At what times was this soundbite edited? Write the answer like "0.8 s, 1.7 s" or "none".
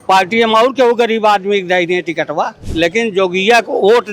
2.6 s

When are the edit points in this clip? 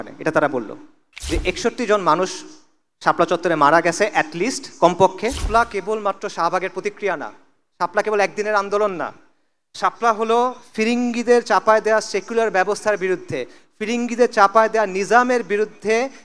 1.1 s, 5.4 s

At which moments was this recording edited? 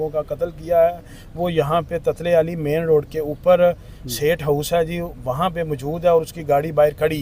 none

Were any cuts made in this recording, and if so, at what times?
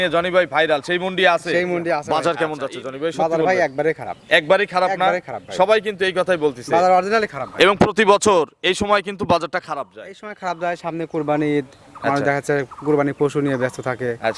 2.0 s

